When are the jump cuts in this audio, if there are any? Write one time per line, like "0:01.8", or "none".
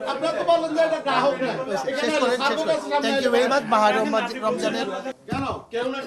0:05.1